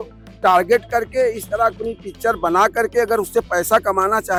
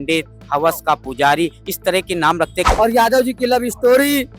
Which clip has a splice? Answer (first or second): second